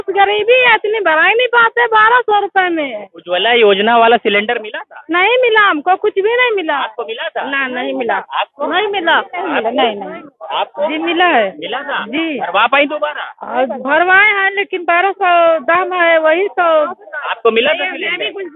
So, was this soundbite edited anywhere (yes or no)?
no